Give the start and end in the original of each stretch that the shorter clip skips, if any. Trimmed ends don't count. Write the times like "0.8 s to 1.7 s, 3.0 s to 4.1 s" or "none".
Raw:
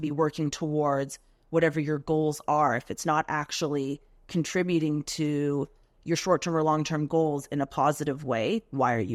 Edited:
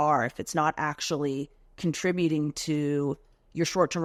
none